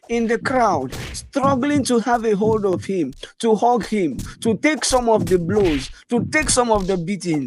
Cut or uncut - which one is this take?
uncut